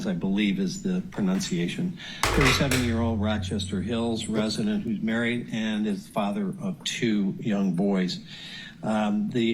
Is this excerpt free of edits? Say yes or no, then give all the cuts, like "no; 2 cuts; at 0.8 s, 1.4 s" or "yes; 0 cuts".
yes; 0 cuts